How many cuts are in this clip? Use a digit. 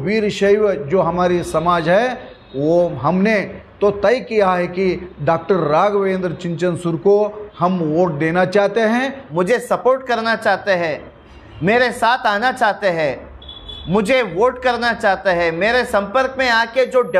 1